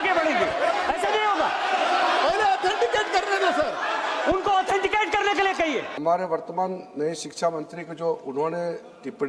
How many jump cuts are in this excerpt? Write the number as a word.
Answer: one